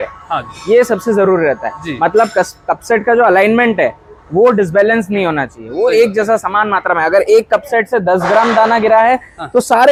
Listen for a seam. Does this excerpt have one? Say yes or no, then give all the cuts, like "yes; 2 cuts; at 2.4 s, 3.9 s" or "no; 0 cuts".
no; 0 cuts